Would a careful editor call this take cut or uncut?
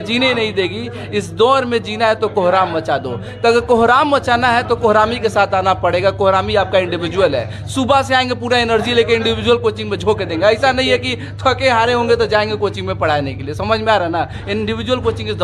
uncut